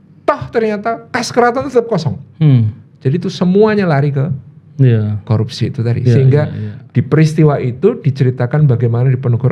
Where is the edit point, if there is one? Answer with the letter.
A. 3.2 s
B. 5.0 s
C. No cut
C